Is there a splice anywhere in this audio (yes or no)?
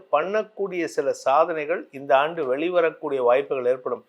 no